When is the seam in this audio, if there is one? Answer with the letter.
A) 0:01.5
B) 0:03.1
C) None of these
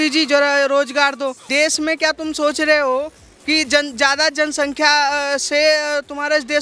A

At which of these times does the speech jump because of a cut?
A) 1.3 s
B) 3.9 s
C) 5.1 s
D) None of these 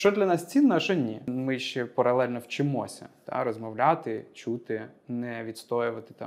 A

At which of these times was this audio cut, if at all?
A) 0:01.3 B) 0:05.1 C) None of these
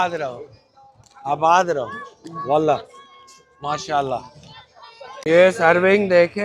B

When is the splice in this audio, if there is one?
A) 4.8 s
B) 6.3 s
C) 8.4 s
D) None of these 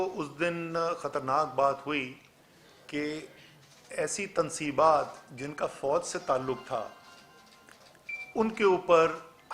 D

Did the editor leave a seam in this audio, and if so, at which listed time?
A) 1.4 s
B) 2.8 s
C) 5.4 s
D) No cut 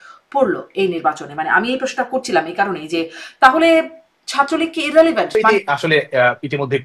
C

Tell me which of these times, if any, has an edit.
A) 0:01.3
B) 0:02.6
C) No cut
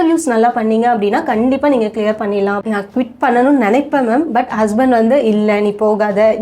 B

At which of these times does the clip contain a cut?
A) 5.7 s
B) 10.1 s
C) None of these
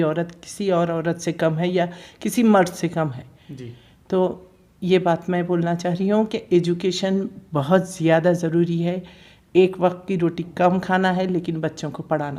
C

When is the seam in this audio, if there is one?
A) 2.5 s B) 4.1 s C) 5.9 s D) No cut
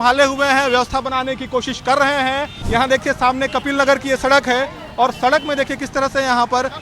A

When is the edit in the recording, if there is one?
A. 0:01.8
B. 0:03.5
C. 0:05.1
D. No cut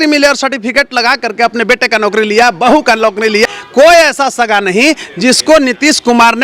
B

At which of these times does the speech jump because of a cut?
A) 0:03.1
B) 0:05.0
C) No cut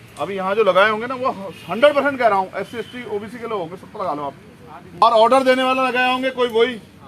B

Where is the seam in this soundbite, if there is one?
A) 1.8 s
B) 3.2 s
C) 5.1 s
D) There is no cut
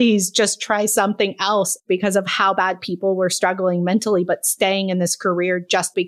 A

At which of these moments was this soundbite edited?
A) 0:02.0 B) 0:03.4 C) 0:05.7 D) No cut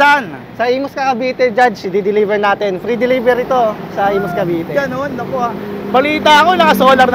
D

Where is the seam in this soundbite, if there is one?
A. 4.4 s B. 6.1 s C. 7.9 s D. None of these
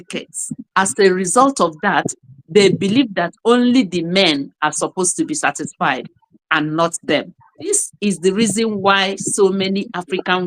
C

